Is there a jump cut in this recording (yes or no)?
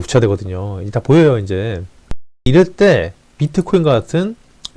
yes